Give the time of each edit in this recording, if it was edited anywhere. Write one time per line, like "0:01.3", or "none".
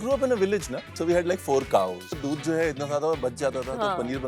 0:00.9
0:02.2